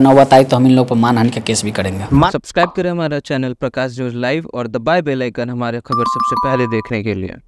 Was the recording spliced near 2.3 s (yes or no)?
yes